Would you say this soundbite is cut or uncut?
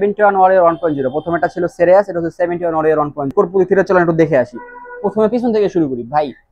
cut